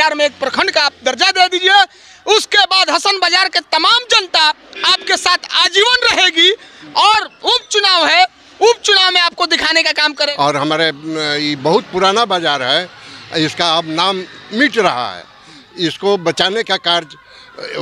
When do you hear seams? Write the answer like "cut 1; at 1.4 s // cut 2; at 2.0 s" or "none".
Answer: cut 1; at 10.3 s